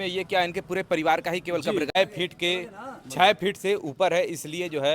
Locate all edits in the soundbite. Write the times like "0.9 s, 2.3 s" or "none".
2.0 s